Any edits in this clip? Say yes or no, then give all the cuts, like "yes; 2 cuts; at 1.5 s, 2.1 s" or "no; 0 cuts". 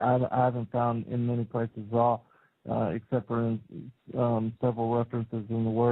yes; 1 cut; at 3.9 s